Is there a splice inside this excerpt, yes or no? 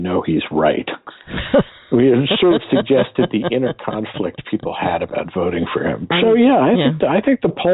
yes